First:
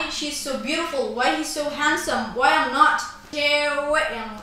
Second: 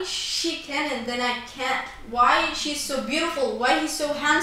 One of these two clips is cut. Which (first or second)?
first